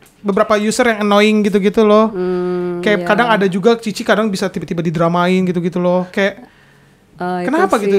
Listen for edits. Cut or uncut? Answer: uncut